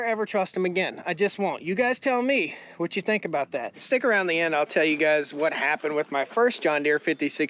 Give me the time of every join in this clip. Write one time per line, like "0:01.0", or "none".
0:03.8